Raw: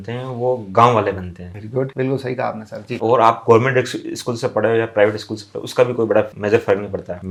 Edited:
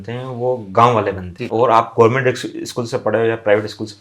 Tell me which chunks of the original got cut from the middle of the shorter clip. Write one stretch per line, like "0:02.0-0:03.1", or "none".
0:01.3-0:02.8